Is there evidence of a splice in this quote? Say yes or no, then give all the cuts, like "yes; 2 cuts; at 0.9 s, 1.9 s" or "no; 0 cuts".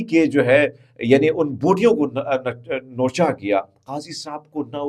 no; 0 cuts